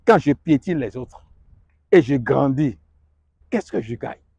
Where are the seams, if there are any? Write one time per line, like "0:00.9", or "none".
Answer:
none